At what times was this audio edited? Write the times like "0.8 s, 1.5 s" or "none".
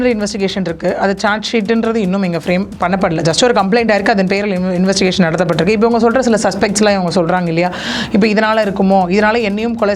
none